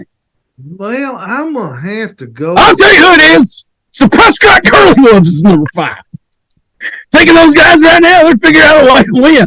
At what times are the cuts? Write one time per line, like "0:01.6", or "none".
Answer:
none